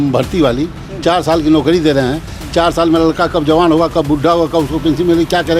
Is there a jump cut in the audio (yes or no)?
no